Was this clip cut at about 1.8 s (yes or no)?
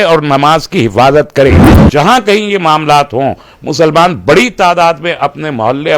yes